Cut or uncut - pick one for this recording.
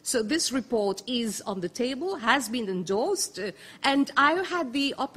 uncut